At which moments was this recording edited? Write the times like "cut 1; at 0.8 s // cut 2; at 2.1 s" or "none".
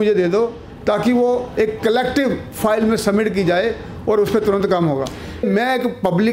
cut 1; at 5.4 s